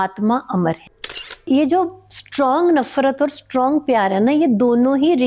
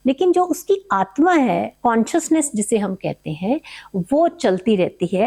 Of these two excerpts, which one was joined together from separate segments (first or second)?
first